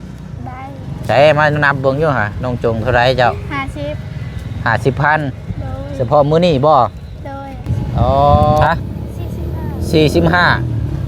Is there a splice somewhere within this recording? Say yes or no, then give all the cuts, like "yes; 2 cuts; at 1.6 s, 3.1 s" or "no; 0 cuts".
yes; 1 cut; at 8.6 s